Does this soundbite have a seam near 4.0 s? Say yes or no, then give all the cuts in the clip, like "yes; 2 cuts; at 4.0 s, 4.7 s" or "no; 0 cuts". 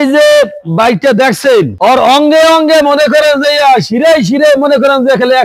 no; 1 cut; at 1.7 s